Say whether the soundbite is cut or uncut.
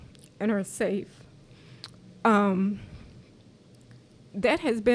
uncut